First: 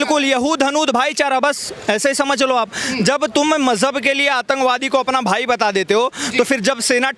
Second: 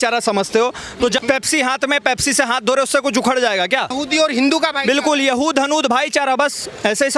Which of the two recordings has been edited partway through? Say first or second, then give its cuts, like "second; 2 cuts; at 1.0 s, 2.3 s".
second; 2 cuts; at 1.2 s, 4.0 s